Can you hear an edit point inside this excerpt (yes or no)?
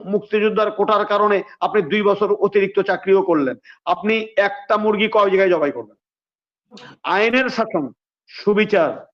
yes